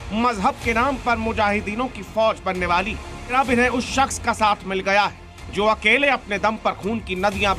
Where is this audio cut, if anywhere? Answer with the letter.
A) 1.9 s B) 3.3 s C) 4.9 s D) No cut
B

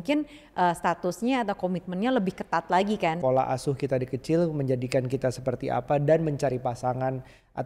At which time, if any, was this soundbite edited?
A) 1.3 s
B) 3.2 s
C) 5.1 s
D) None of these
B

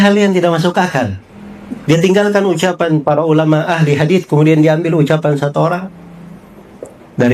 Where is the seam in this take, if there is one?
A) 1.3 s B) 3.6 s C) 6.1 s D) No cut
D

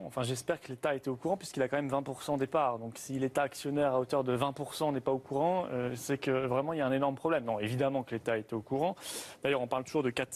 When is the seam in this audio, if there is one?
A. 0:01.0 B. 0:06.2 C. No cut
A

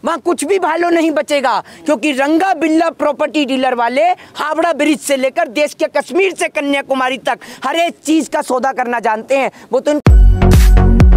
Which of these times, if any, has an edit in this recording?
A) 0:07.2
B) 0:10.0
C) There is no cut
B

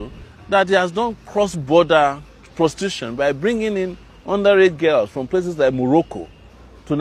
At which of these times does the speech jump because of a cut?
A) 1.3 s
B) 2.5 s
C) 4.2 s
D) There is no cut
D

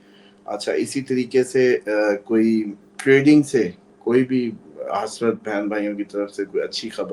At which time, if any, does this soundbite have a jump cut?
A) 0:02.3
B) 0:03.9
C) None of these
B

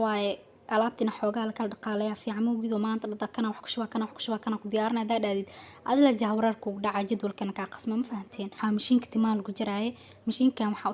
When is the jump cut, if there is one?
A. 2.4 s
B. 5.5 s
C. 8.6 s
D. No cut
C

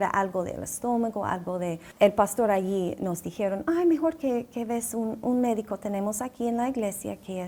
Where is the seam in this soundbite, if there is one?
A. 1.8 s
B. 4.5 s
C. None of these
A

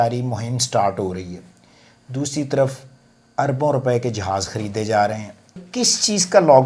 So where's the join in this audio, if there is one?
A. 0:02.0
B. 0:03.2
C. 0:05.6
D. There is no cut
C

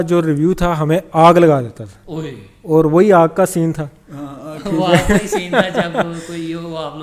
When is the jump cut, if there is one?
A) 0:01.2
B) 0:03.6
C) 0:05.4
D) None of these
D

